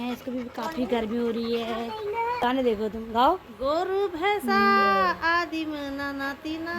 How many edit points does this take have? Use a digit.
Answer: 1